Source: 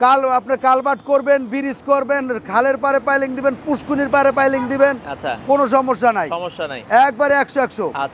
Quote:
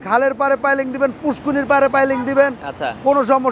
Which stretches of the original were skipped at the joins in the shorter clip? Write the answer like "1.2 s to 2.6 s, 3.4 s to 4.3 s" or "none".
none